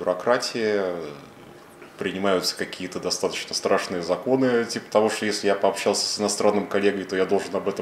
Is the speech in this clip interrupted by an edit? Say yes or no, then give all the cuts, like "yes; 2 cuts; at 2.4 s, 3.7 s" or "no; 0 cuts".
no; 0 cuts